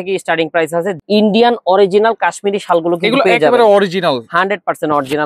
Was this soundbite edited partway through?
yes; 1 cut; at 0.9 s

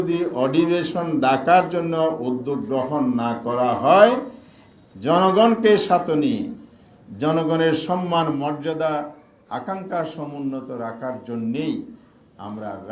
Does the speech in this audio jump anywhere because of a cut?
no; 0 cuts

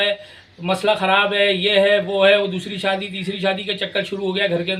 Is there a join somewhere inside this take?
no; 0 cuts

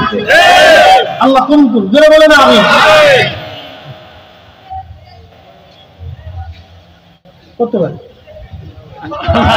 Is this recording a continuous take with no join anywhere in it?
yes; 0 cuts

